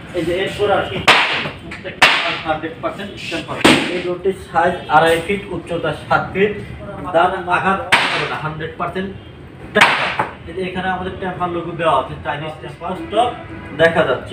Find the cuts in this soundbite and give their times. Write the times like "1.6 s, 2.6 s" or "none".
4.1 s, 7.5 s, 12.7 s